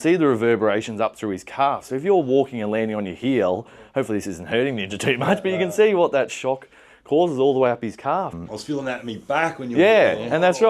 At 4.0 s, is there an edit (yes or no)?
no